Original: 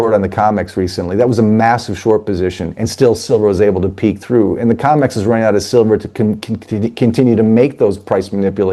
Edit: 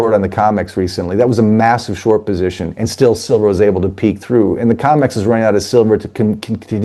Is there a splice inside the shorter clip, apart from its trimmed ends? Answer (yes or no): no